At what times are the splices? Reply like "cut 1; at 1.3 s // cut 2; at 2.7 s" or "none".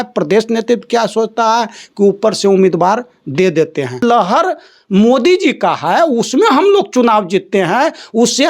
cut 1; at 4.0 s